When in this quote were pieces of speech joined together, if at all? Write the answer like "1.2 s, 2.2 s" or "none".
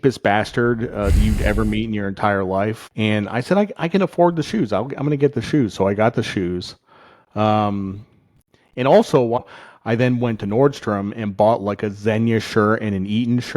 2.8 s, 9.4 s